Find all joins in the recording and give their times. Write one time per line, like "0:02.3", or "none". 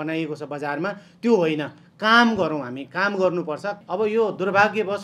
0:03.8